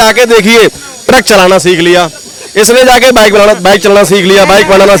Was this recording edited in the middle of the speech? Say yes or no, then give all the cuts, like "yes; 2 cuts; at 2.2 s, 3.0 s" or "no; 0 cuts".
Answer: no; 0 cuts